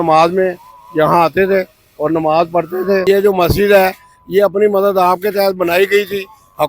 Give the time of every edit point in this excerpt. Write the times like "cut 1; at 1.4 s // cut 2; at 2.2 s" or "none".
cut 1; at 3.0 s

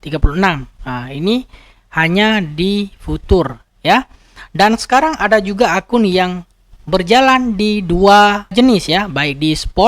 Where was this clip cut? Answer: cut 1; at 8.5 s

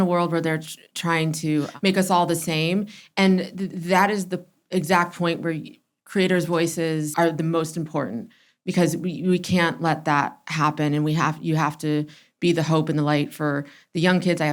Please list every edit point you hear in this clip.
cut 1; at 1.7 s // cut 2; at 7.1 s

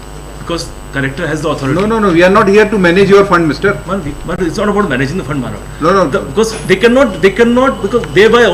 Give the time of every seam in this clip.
none

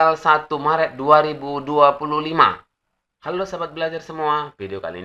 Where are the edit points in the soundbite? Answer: cut 1; at 3.1 s

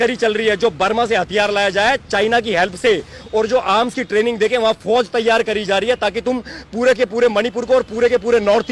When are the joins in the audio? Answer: none

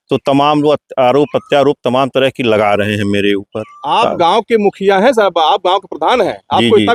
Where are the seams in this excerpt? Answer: none

